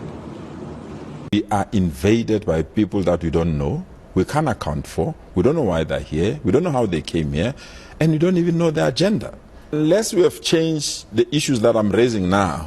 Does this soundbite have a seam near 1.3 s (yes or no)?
yes